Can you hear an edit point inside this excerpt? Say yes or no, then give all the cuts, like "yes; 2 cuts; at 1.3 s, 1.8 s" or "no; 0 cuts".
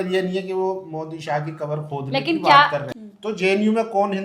yes; 1 cut; at 2.8 s